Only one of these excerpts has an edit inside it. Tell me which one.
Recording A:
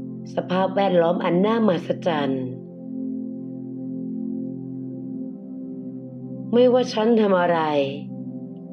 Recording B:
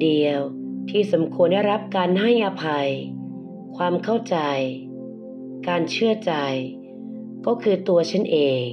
A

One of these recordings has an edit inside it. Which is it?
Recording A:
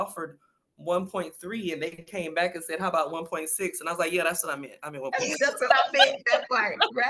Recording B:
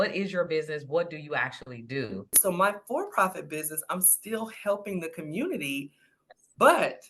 B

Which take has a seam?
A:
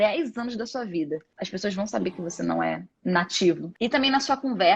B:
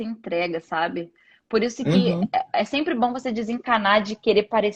A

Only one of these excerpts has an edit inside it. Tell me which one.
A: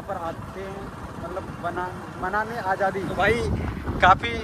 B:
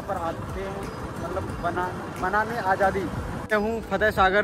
B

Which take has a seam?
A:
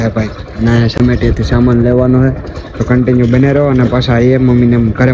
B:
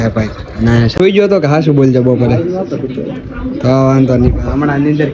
B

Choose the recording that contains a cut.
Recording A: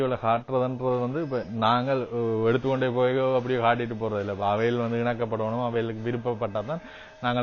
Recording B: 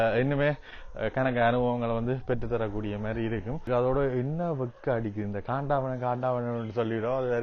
B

